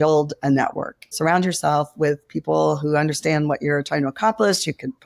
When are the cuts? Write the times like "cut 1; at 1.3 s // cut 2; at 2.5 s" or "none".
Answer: cut 1; at 1.1 s